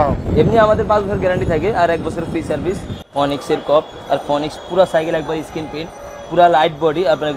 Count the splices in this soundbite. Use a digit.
1